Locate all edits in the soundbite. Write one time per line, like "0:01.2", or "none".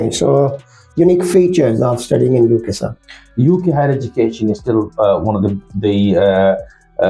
0:03.2